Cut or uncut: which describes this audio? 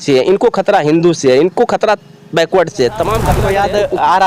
cut